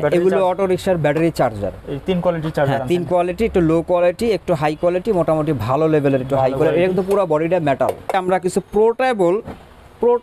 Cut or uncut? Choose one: cut